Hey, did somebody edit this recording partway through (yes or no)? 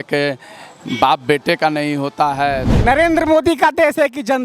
yes